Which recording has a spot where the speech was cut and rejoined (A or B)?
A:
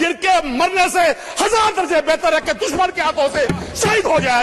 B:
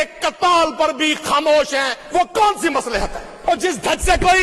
B